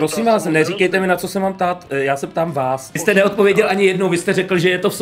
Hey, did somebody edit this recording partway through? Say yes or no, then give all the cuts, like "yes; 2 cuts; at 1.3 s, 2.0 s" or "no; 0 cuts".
yes; 1 cut; at 3.0 s